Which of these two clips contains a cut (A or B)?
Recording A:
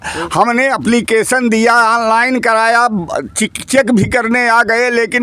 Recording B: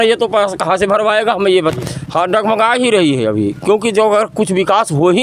B